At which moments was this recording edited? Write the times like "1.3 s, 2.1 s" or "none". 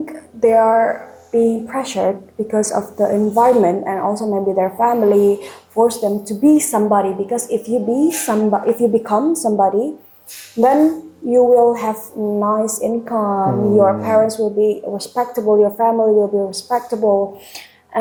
none